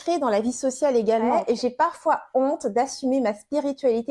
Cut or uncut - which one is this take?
cut